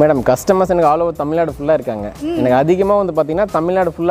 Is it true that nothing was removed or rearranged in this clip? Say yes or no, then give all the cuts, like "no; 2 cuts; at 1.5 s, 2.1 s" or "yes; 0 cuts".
yes; 0 cuts